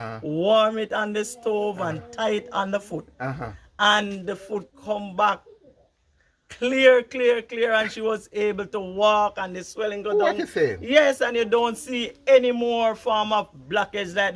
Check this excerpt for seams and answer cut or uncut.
uncut